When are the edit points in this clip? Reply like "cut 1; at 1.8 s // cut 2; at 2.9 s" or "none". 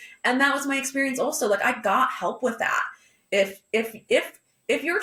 none